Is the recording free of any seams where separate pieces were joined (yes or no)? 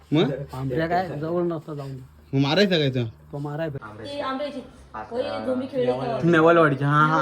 no